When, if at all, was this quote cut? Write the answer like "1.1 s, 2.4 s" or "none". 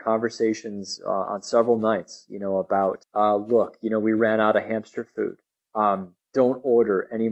3.0 s